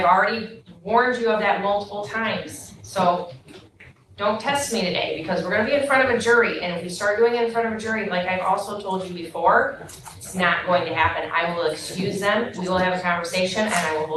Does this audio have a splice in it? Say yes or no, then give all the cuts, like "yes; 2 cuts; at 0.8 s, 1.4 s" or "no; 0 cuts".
no; 0 cuts